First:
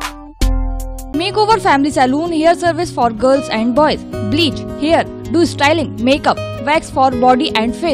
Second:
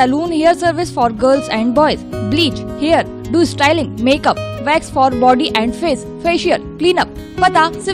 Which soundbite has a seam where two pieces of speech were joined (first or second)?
first